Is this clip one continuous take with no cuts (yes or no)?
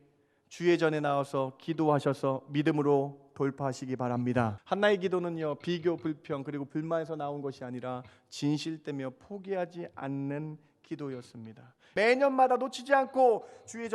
no